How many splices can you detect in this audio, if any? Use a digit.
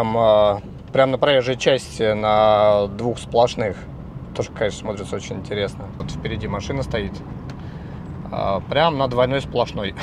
0